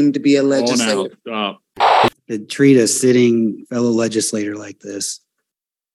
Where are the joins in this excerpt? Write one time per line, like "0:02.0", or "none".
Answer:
0:02.1